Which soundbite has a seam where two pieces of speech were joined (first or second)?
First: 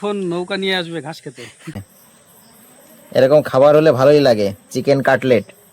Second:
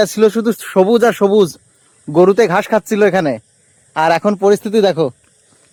first